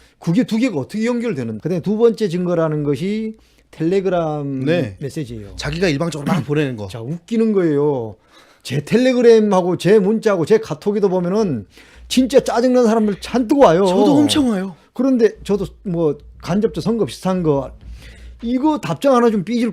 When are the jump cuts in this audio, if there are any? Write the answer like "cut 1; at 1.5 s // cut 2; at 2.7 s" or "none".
cut 1; at 1.6 s